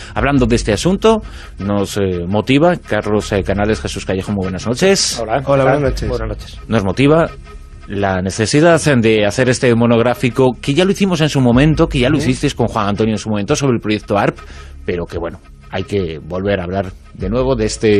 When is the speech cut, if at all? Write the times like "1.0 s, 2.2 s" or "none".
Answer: none